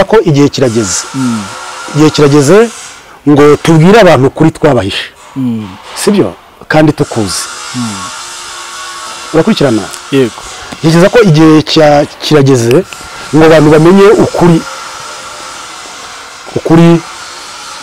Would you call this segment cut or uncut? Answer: uncut